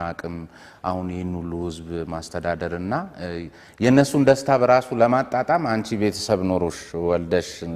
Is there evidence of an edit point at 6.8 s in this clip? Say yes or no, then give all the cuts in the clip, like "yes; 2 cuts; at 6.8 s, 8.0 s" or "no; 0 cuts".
no; 0 cuts